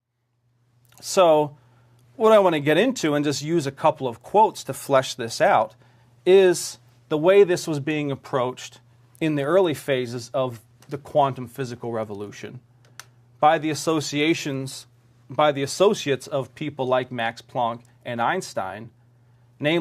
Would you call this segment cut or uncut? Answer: cut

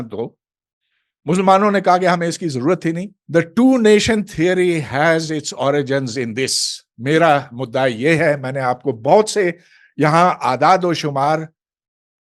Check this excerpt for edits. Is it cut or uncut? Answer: cut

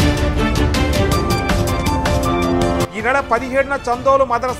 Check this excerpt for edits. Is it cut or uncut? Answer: cut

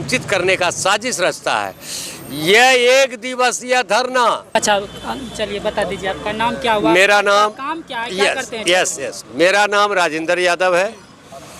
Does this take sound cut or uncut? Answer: cut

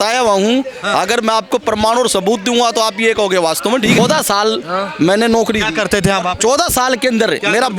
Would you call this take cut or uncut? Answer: cut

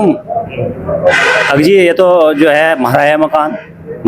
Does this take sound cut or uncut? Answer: uncut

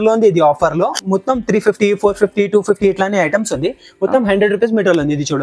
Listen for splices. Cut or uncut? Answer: uncut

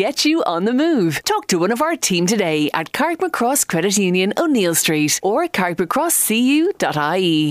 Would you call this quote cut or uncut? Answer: uncut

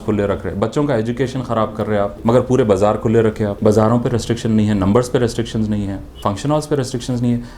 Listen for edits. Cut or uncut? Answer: cut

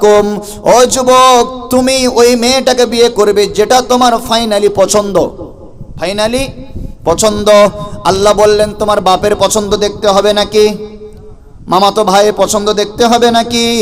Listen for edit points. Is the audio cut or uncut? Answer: uncut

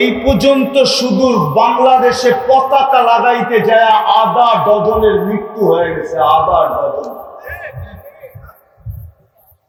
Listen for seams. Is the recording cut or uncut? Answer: uncut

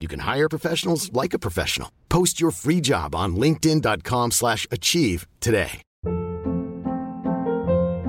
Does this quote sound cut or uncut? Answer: cut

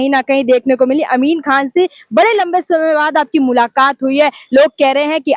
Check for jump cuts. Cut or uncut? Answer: uncut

